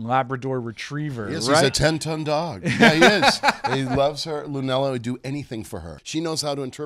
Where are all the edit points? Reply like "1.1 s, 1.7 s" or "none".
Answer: 6.0 s